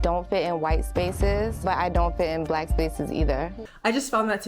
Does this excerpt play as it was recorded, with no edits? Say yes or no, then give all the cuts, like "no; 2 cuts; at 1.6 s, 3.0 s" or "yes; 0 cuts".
yes; 0 cuts